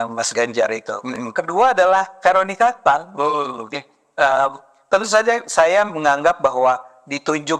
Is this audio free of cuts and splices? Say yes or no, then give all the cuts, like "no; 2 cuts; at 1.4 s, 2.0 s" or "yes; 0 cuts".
yes; 0 cuts